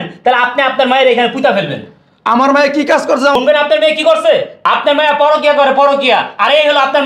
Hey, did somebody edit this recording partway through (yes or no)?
yes